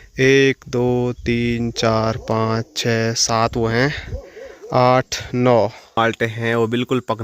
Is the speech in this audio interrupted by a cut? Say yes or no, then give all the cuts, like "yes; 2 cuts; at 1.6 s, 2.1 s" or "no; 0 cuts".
yes; 1 cut; at 6.0 s